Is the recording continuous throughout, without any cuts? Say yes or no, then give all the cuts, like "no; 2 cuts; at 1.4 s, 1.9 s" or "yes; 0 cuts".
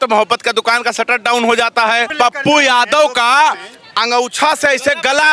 no; 1 cut; at 2.1 s